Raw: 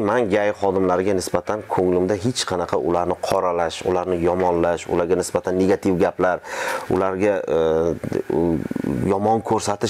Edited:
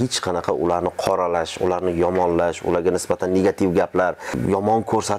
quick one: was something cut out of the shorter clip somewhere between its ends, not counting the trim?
yes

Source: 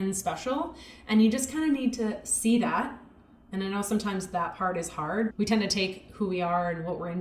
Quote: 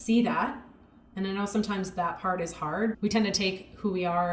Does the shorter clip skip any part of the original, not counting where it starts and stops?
no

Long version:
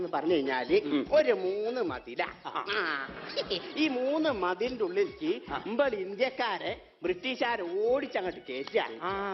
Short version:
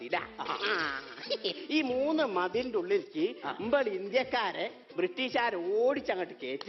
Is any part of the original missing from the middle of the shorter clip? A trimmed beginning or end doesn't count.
no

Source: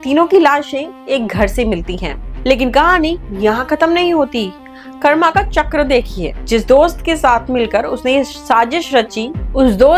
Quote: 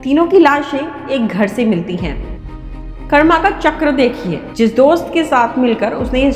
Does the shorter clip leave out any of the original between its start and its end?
yes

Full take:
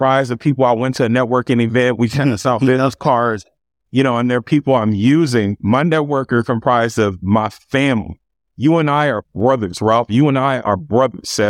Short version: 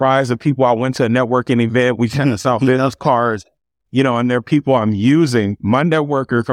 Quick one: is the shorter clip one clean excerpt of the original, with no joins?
yes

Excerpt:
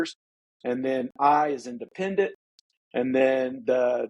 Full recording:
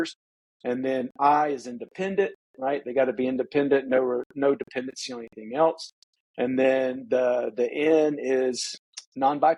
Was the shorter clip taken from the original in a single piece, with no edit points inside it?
no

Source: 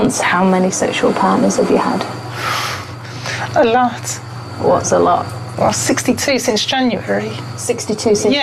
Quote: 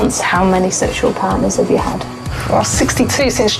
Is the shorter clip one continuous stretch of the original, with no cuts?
no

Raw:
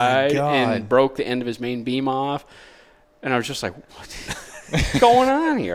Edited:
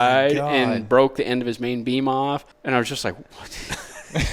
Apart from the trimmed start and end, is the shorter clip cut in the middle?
yes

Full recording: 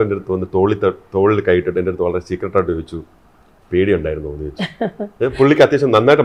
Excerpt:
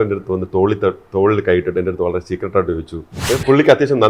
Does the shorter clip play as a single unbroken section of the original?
no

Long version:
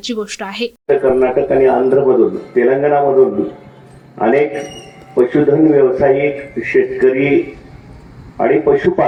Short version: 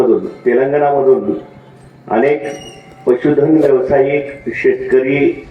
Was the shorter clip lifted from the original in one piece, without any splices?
yes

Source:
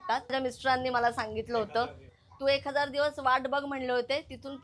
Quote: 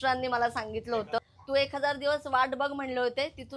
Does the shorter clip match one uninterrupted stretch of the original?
no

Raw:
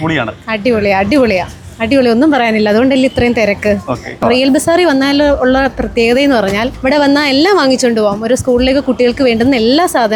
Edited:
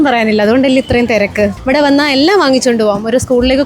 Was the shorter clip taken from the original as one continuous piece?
no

